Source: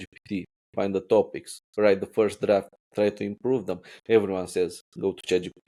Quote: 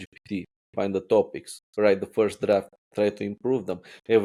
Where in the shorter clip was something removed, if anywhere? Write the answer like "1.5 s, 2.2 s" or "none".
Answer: none